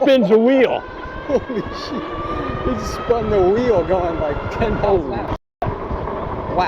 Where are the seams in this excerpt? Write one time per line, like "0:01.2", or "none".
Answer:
none